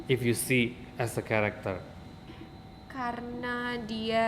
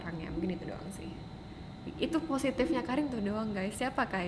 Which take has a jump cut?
first; 1 cut; at 2.3 s

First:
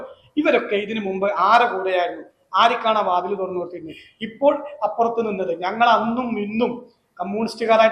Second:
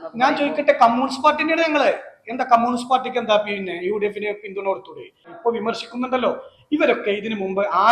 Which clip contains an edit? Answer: second; 1 cut; at 5.3 s

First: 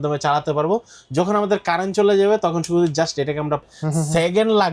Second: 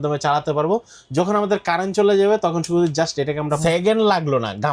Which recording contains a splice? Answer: second; 1 cut; at 3.6 s

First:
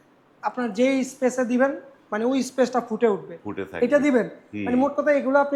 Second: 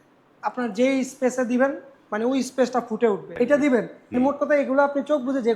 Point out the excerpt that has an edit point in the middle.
second; 2 cuts; at 3.3 s, 4.0 s

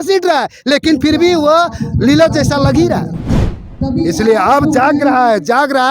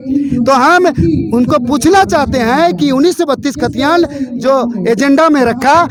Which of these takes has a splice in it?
first; 1 cut; at 3.4 s

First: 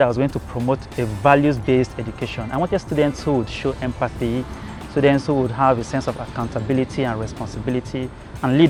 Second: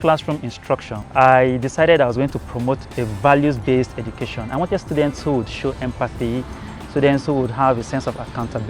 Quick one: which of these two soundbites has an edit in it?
second; 1 cut; at 1.0 s

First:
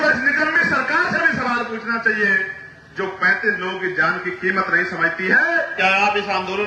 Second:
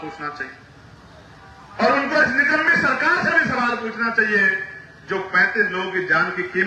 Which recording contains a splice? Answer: first; 1 cut; at 5.7 s

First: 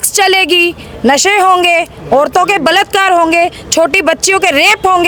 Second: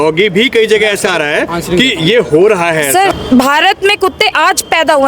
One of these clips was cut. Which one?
second; 1 cut; at 3.1 s

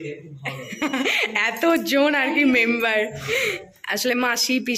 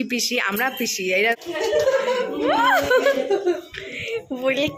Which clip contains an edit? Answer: second; 1 cut; at 1.3 s

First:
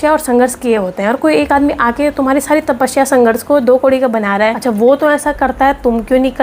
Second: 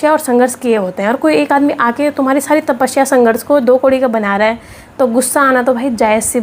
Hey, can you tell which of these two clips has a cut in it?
first; 1 cut; at 4.6 s

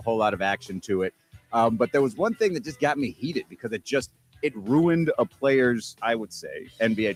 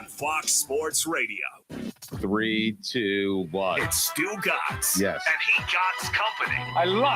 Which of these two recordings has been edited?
second; 1 cut; at 1.6 s

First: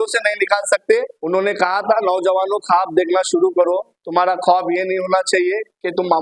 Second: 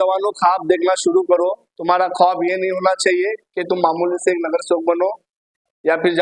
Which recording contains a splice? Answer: first; 1 cut; at 1.2 s

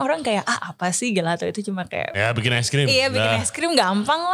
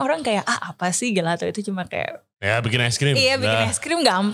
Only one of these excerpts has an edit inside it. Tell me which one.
first; 1 cut; at 2.1 s

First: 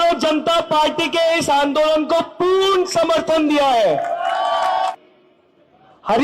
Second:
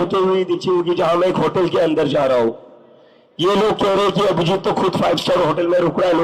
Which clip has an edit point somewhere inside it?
first; 1 cut; at 4.9 s

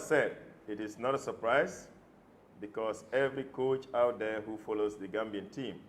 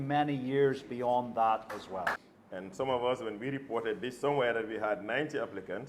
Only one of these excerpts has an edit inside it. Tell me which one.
second; 1 cut; at 2.3 s

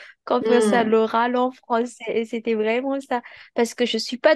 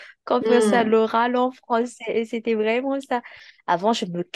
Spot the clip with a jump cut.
second; 1 cut; at 3.4 s

